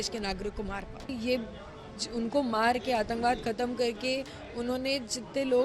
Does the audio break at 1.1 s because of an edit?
yes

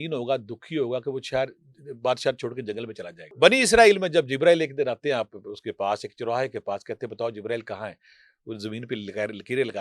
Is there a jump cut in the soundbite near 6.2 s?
no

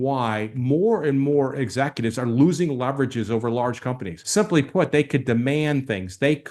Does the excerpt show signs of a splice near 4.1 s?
yes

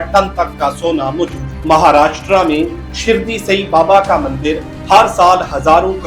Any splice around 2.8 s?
no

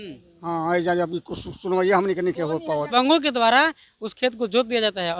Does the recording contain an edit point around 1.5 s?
no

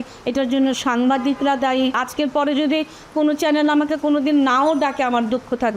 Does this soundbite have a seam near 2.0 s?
yes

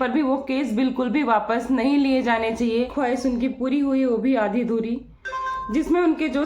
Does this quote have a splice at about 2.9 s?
yes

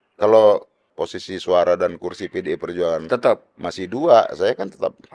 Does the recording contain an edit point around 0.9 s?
yes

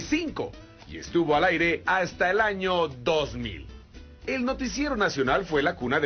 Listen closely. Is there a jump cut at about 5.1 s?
yes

